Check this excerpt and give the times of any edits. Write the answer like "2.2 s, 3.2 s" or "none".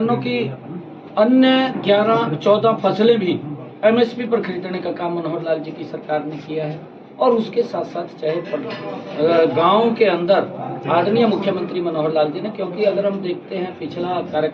none

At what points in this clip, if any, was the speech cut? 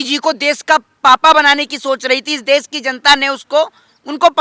none

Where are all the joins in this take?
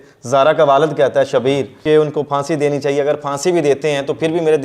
1.7 s

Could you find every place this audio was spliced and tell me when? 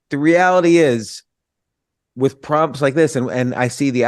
none

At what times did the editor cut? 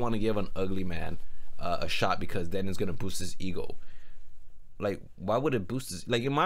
none

